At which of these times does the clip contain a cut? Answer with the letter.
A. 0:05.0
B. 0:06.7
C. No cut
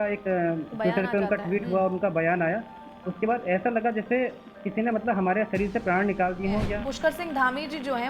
B